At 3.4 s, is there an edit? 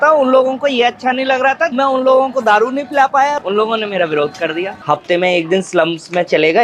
yes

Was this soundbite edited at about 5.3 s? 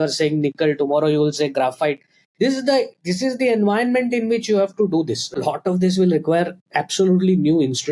yes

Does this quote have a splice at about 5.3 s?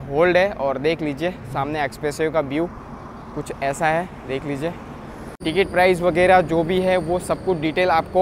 yes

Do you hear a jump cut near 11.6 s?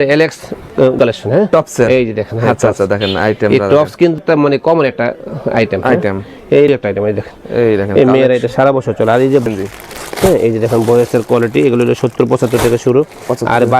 no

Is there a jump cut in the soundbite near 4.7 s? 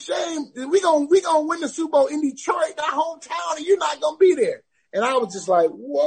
no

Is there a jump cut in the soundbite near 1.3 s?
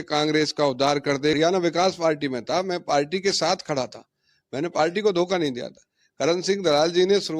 yes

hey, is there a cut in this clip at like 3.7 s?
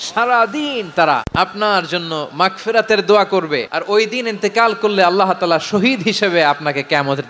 yes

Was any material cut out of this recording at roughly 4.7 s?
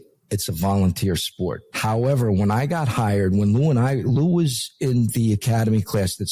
no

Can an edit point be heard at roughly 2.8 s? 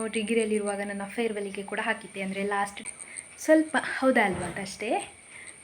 yes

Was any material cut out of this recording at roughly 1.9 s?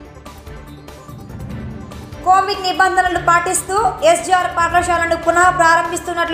yes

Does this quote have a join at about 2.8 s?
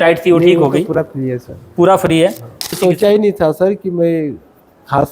yes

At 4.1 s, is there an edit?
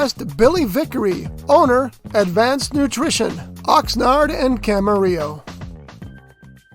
no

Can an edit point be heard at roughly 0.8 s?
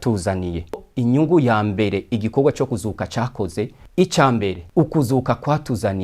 yes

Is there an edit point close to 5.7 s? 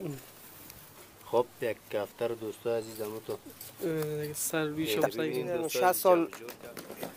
yes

